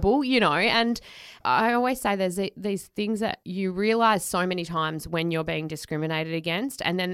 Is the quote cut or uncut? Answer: cut